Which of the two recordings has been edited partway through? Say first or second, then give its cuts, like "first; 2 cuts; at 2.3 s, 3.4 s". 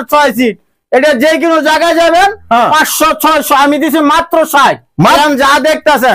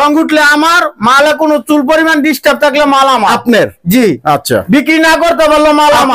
first; 1 cut; at 5.2 s